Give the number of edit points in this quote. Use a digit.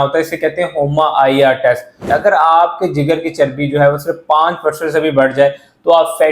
1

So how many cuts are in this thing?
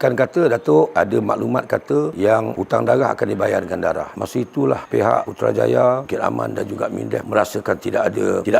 2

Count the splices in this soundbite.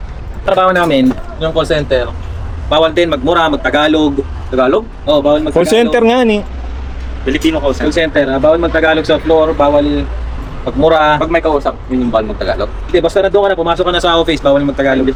0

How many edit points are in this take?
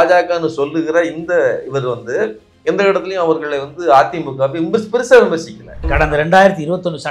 1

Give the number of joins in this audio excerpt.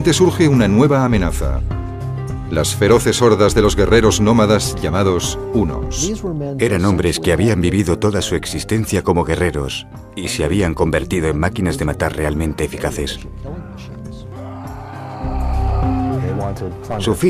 0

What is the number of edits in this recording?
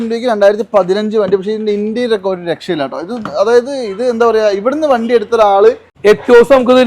1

